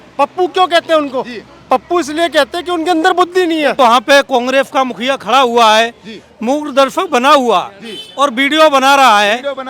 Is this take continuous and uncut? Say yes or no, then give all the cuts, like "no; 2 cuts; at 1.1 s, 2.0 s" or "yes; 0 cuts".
no; 1 cut; at 3.8 s